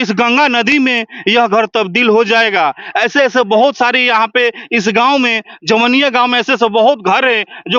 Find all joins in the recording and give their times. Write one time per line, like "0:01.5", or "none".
none